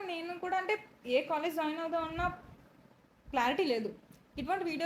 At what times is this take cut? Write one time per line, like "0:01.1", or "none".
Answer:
none